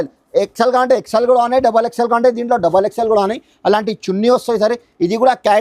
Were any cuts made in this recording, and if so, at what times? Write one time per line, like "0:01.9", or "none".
none

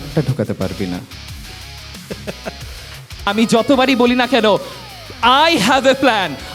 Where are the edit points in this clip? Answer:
0:03.3

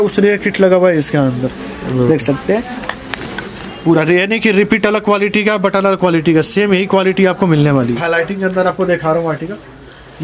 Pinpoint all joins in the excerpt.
0:08.0

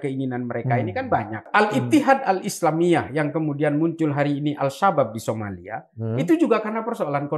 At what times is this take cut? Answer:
0:01.4

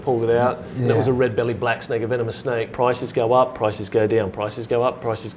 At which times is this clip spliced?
0:02.7

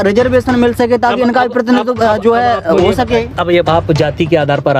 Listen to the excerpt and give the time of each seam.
0:03.6

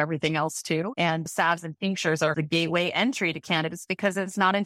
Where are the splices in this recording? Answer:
0:01.3
0:02.3

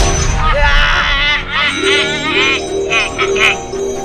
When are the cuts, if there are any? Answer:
none

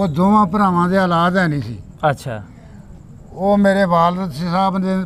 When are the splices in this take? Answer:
none

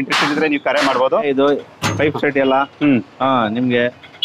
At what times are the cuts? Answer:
0:01.3

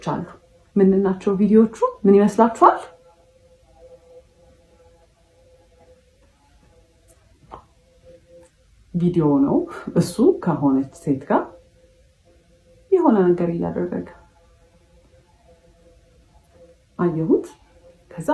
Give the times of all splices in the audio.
none

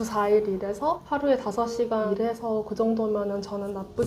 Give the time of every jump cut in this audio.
0:01.0
0:02.1

